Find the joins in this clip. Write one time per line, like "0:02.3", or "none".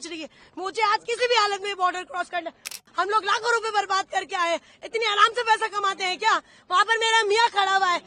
0:02.8